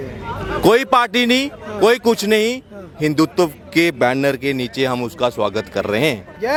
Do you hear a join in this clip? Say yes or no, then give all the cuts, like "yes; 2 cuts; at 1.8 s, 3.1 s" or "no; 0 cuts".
no; 0 cuts